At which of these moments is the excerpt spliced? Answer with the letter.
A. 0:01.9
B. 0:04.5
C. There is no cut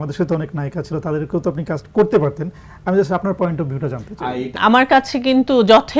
B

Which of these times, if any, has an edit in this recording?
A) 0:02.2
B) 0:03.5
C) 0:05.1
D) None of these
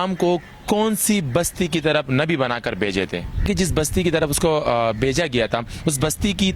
B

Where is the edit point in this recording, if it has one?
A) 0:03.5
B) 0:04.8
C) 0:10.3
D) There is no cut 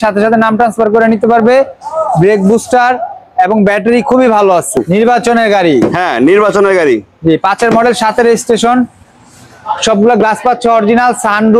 B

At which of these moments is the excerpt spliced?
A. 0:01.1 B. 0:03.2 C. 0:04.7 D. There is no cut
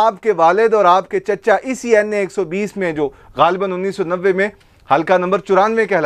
D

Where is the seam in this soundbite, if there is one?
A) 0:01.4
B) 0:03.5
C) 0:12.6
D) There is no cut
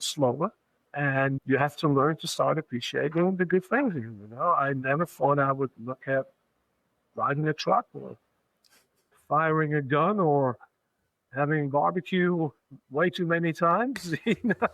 A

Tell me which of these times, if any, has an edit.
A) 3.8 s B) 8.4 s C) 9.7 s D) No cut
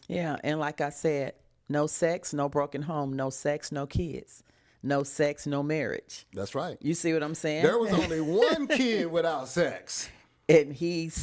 D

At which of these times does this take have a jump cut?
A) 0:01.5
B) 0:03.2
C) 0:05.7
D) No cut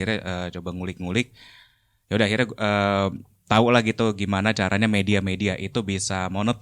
D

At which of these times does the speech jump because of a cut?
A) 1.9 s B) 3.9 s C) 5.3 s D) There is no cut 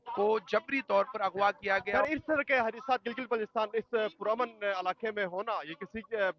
A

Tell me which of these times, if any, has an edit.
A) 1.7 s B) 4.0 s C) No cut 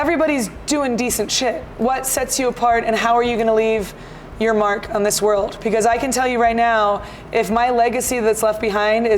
A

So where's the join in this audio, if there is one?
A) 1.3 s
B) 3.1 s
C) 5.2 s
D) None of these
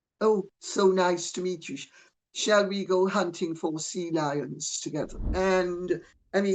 C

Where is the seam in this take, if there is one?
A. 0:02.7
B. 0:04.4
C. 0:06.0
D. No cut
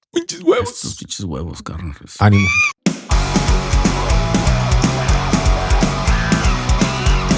A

